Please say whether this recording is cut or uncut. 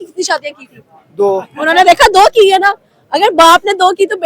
uncut